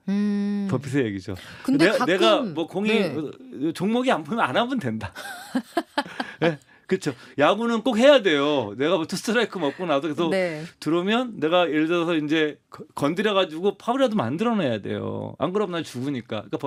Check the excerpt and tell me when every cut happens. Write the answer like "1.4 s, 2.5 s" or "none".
none